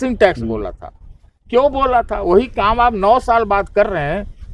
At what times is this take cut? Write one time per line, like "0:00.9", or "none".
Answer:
none